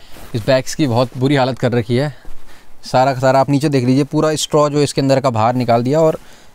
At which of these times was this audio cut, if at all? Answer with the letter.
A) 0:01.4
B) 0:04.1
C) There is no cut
C